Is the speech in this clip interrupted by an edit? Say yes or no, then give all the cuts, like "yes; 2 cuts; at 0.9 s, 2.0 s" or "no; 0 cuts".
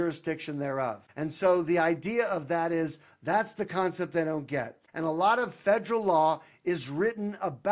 yes; 2 cuts; at 1.0 s, 4.8 s